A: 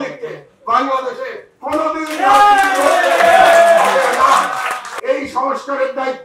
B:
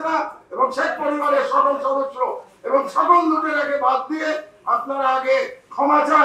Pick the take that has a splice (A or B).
A